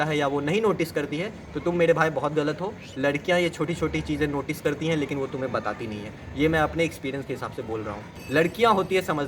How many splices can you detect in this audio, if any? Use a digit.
1